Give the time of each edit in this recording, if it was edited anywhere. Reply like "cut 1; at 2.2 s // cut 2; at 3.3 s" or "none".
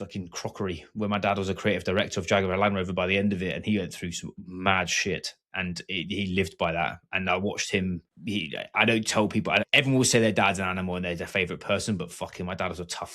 cut 1; at 8.1 s // cut 2; at 9.7 s